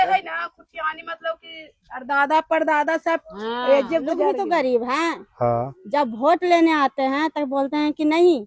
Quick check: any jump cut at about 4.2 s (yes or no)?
yes